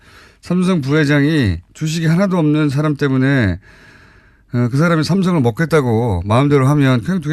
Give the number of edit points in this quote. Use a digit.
1